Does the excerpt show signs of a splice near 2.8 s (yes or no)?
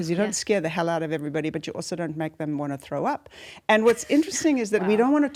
no